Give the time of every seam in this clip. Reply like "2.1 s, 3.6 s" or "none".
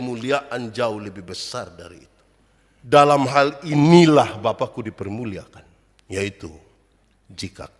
2.9 s

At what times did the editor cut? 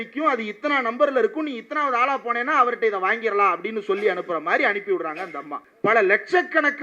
5.6 s

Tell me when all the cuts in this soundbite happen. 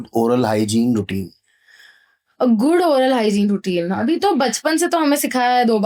none

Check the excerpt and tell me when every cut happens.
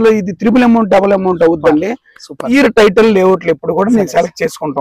2.5 s

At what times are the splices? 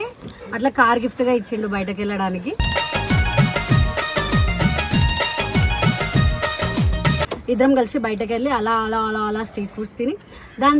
7.3 s

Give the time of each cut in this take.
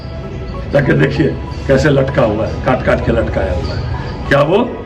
none

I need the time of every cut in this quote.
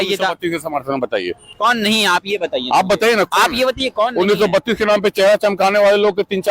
1.4 s

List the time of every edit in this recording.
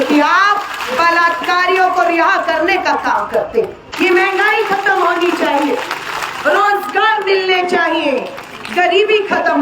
3.8 s

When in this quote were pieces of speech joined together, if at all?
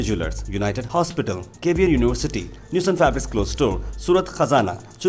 none

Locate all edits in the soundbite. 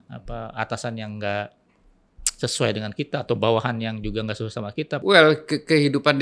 5.0 s

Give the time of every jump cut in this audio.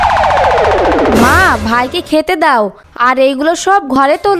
none

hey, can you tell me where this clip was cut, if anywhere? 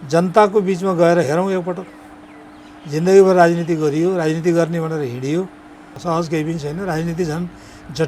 5.9 s

